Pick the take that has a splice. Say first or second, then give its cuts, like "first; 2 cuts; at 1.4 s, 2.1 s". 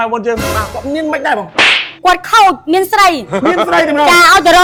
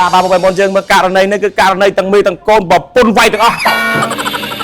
second; 1 cut; at 3.6 s